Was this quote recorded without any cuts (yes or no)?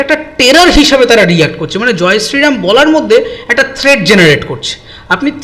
yes